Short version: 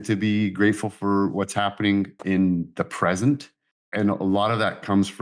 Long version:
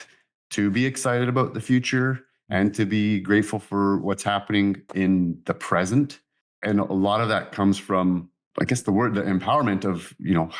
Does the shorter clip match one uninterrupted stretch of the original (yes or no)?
yes